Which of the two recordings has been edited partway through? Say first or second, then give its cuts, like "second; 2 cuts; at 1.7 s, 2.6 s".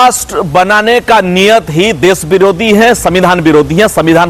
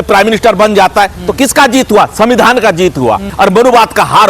second; 1 cut; at 3.3 s